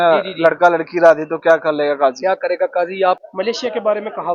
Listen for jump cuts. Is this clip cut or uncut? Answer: cut